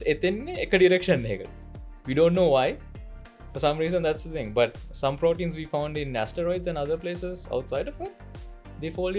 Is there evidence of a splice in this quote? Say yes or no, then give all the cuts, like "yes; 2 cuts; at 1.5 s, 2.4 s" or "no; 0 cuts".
no; 0 cuts